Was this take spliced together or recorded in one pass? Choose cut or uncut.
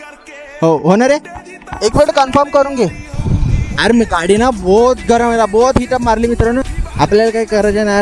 cut